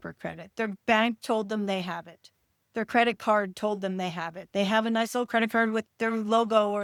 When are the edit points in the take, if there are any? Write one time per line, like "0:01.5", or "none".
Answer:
none